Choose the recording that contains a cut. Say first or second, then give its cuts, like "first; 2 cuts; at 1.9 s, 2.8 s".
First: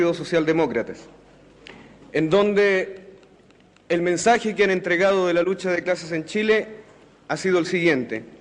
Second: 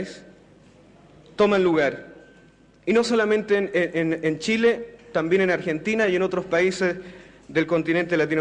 first; 1 cut; at 5.6 s